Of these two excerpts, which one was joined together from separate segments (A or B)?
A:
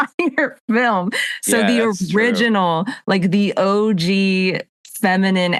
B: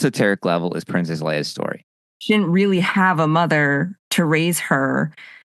B